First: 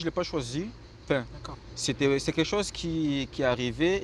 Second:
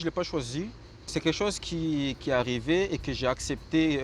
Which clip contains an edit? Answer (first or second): second